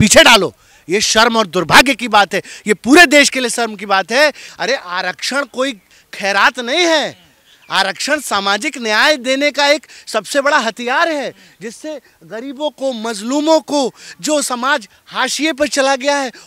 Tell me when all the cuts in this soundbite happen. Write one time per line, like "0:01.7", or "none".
0:04.5